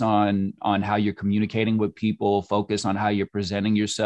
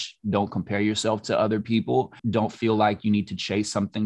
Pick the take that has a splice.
second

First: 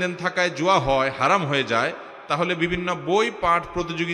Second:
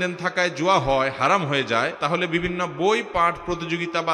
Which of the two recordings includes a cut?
second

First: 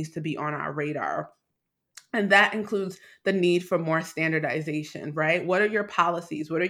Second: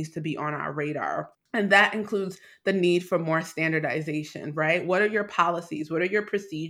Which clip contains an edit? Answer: second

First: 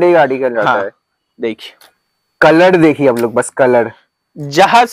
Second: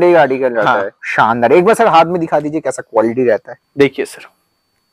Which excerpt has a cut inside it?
second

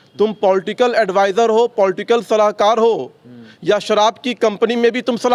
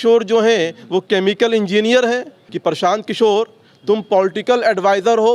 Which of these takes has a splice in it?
second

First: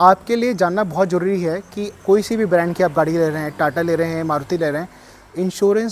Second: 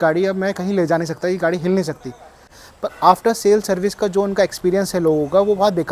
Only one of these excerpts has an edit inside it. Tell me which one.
second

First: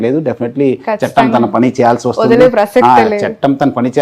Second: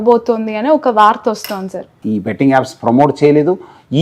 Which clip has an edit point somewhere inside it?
second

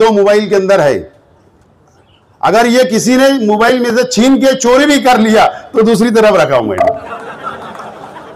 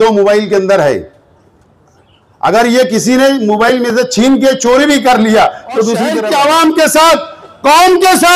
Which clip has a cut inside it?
second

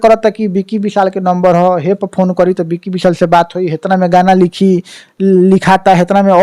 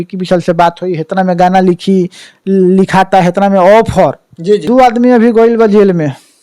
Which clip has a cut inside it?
second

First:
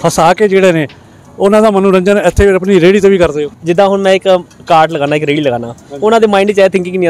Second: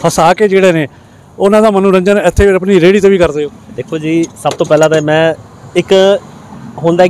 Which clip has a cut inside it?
first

